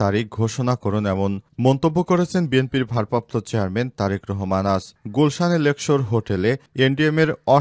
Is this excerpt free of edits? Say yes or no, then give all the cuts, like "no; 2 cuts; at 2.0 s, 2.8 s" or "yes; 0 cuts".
yes; 0 cuts